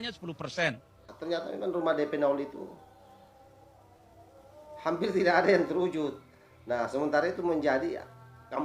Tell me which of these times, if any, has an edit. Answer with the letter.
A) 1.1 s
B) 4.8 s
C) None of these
A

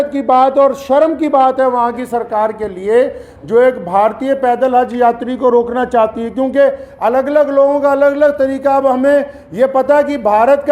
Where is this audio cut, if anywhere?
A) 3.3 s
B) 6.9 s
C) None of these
C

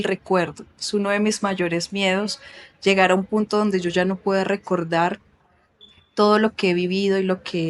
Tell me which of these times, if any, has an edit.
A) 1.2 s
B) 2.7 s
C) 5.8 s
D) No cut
D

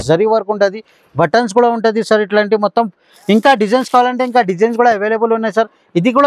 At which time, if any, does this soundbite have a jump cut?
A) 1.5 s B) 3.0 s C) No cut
C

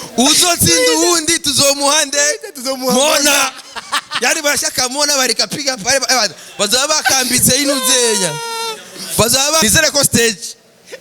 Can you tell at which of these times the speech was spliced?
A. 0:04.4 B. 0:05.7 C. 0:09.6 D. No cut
C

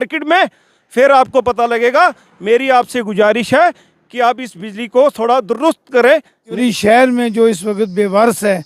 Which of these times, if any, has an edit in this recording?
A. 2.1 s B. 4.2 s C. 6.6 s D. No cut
C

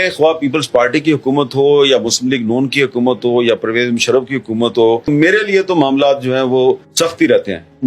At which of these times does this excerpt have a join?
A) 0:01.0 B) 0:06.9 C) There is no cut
B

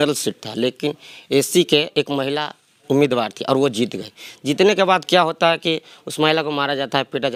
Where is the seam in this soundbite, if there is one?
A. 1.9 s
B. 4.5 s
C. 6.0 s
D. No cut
D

